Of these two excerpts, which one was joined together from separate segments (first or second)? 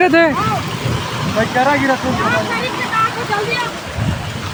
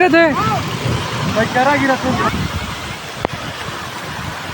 second